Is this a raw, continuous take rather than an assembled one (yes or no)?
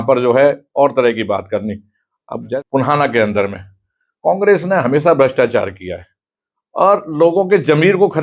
no